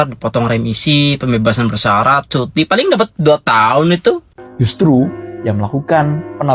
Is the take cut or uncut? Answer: cut